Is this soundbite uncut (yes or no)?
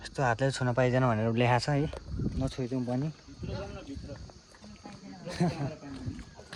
yes